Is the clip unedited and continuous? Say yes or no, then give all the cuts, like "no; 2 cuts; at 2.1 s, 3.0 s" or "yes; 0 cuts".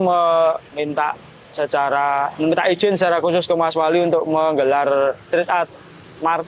yes; 0 cuts